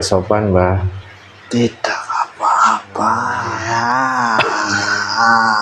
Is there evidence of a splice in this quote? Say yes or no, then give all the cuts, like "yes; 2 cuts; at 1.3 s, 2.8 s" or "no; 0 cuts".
yes; 1 cut; at 3.5 s